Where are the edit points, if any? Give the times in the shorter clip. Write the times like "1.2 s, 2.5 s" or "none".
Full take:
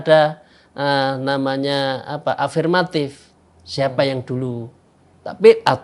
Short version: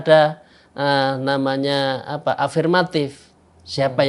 none